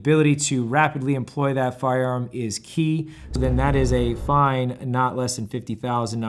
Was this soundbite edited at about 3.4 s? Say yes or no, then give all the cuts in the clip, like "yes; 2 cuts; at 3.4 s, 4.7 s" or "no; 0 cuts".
yes; 1 cut; at 3.4 s